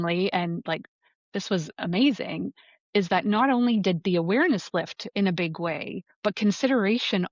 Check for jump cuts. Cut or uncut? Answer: uncut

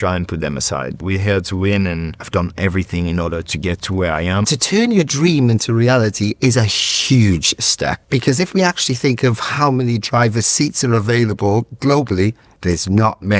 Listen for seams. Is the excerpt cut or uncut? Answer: cut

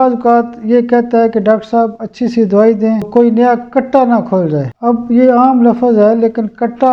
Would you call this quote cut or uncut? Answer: cut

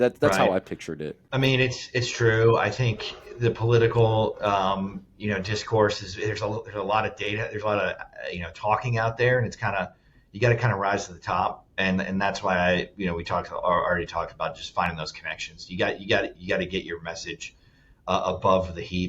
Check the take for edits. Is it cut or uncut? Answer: cut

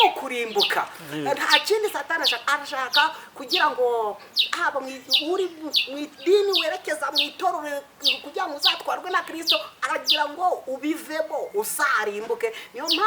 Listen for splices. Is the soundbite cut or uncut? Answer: uncut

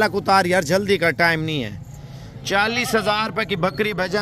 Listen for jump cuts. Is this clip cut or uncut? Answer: uncut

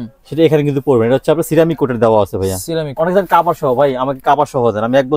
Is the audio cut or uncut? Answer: cut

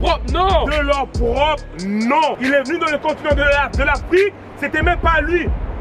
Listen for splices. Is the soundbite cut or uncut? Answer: cut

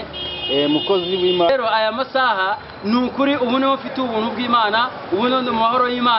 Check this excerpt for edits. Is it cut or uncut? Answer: cut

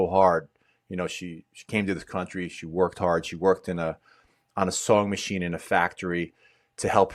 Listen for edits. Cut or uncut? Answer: uncut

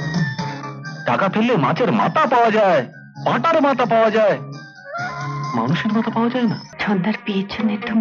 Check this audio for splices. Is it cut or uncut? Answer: cut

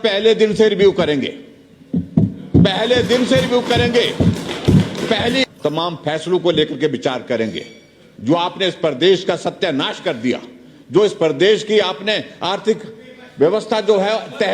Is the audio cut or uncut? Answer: cut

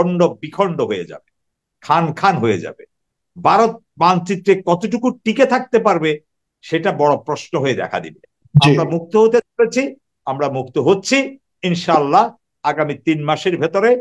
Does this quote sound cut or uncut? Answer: cut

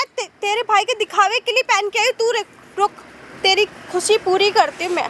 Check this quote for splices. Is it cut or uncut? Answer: uncut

